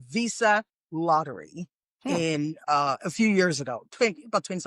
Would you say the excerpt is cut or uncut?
uncut